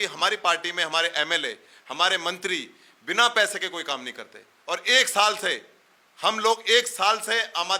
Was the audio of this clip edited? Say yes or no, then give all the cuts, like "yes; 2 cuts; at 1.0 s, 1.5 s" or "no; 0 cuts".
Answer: no; 0 cuts